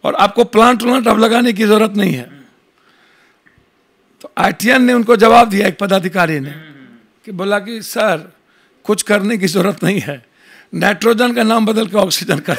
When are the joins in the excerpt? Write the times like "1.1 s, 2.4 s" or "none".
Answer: none